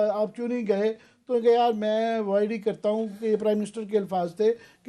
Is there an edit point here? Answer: no; 0 cuts

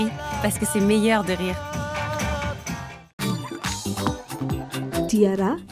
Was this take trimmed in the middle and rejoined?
no; 0 cuts

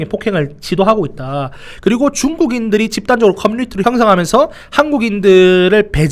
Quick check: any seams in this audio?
yes; 1 cut; at 3.8 s

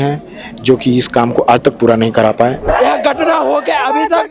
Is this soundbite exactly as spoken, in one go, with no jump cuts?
no; 1 cut; at 2.6 s

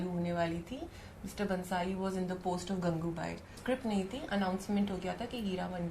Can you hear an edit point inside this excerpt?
yes; 1 cut; at 3.6 s

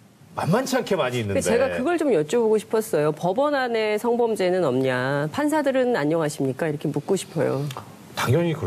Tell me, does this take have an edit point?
no; 0 cuts

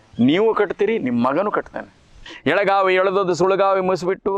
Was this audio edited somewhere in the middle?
yes; 1 cut; at 2.3 s

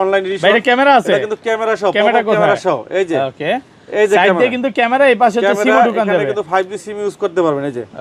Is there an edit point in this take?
no; 0 cuts

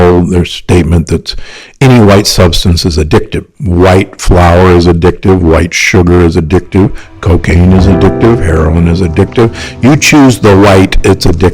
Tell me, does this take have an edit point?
yes; 1 cut; at 3.5 s

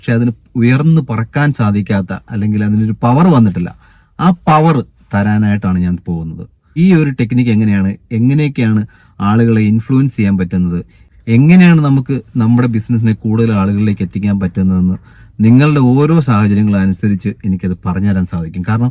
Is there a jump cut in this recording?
yes; 1 cut; at 6.8 s

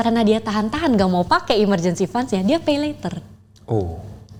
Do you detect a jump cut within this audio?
no; 0 cuts

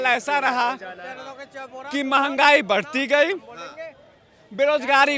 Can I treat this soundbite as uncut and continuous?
yes; 0 cuts

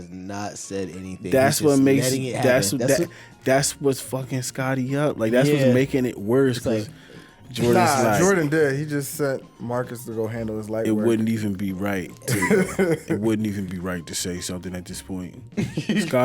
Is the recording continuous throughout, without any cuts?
yes; 0 cuts

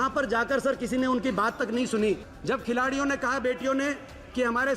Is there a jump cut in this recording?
yes; 1 cut; at 2.3 s

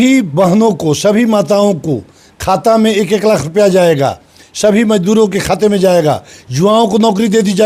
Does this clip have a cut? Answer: no; 0 cuts

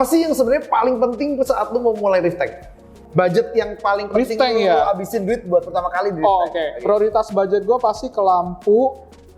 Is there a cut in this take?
yes; 1 cut; at 2.9 s

